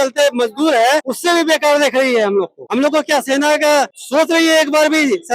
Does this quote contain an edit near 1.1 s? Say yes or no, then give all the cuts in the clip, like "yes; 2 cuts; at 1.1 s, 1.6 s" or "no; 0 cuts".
yes; 3 cuts; at 1.1 s, 2.6 s, 4.0 s